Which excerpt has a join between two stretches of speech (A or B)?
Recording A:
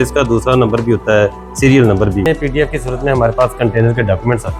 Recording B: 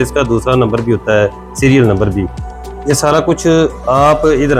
A